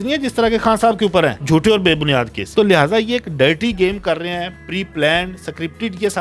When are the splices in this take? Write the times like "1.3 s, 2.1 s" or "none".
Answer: none